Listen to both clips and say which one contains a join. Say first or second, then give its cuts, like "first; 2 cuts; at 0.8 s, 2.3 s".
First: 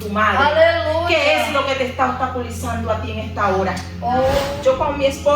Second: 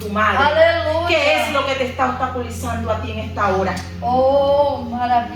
first; 1 cut; at 4.4 s